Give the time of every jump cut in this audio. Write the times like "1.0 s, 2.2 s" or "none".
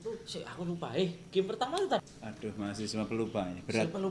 2.0 s